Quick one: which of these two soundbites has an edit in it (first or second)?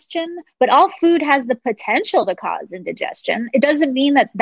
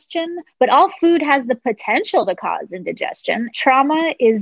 second